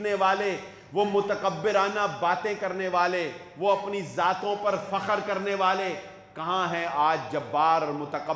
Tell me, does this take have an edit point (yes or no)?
no